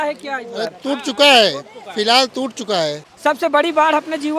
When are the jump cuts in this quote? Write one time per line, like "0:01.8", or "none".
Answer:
0:03.1